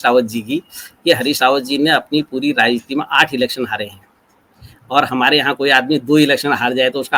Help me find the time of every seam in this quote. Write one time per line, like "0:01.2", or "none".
none